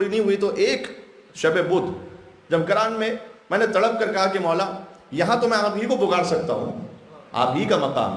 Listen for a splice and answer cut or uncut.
uncut